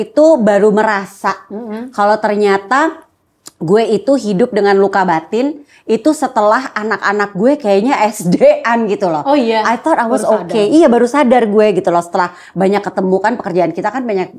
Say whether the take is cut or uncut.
uncut